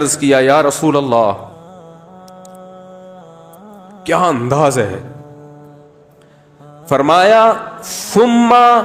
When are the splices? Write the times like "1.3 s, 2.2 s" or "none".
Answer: 1.5 s, 4.0 s, 5.1 s, 6.9 s